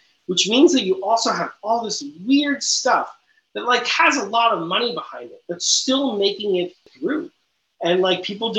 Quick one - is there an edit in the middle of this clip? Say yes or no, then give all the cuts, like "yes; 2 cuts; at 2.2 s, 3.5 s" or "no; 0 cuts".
yes; 1 cut; at 6.9 s